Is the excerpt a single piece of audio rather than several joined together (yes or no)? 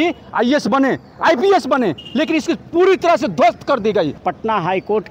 no